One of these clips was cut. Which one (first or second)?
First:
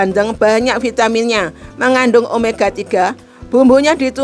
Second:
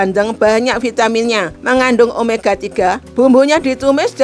second